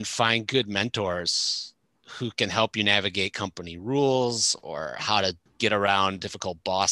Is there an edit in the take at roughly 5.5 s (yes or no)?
yes